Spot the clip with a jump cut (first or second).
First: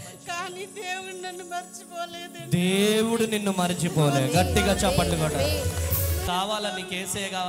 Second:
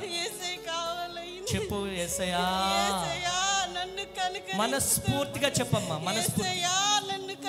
first